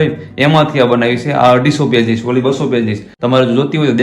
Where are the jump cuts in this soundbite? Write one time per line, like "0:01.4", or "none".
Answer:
0:03.1